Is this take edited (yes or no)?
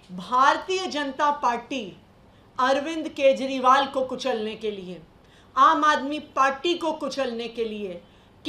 no